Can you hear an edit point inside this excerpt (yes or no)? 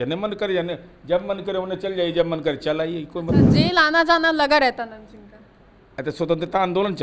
no